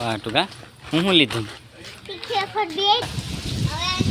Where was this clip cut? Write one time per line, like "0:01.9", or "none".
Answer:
0:03.0